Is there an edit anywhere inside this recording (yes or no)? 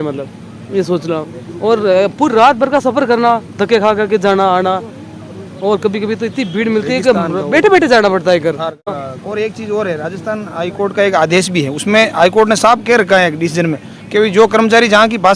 yes